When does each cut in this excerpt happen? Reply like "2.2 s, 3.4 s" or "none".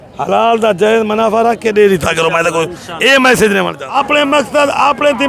3.8 s